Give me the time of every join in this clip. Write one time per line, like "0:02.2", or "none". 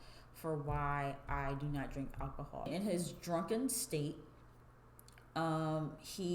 0:02.7